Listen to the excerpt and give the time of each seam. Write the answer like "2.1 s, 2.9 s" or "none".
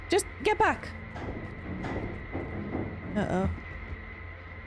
none